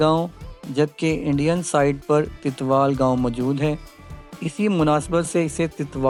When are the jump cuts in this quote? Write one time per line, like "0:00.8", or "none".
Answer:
none